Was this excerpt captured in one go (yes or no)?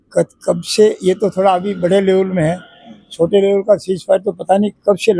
yes